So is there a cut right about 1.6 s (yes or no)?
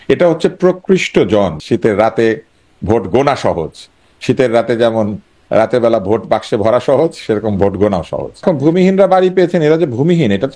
yes